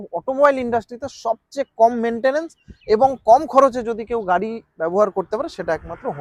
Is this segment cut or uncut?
uncut